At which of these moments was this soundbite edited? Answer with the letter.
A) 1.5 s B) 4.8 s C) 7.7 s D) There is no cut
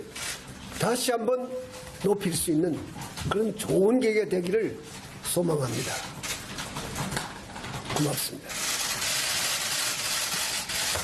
B